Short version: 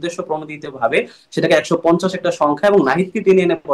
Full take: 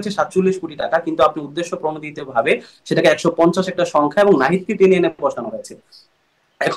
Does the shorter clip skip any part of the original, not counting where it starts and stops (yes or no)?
no